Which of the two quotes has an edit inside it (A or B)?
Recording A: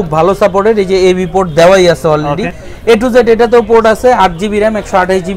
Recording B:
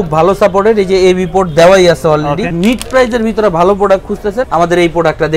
B